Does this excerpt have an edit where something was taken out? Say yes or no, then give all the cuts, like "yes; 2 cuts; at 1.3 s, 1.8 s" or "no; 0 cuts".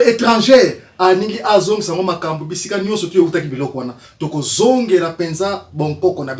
no; 0 cuts